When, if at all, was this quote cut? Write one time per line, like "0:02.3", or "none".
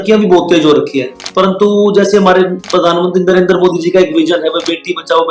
0:01.2

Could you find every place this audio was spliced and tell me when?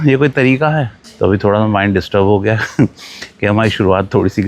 0:00.9

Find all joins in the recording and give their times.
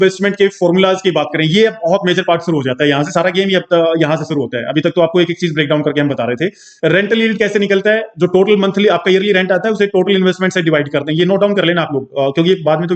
none

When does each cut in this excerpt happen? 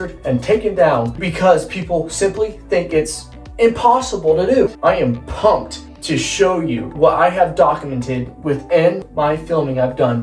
0:01.2
0:04.7
0:06.9
0:09.1

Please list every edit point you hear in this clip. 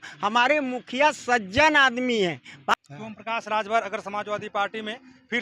0:02.7

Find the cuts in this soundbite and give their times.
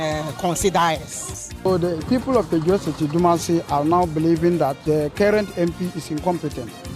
0:01.4
0:04.8

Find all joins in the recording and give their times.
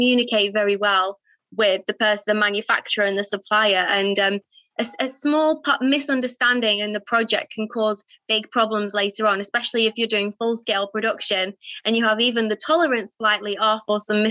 none

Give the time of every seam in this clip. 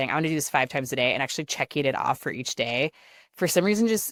none

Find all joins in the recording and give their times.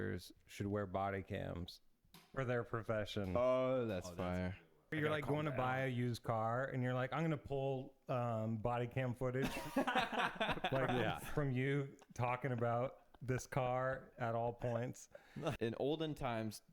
0:04.9
0:15.6

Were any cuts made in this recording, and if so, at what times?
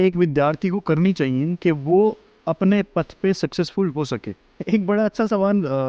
0:04.5

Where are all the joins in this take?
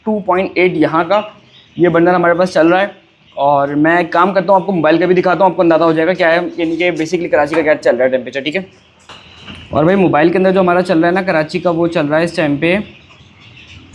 none

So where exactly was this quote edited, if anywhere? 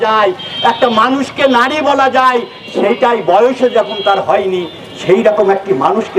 none

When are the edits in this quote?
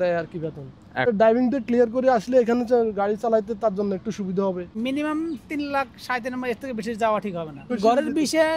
0:01.1
0:04.7
0:07.8

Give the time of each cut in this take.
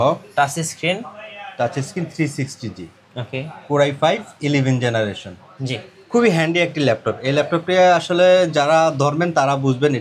none

